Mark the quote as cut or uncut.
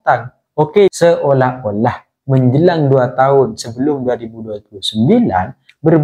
cut